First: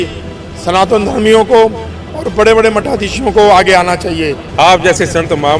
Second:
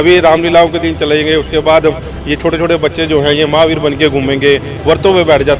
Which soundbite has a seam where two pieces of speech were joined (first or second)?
first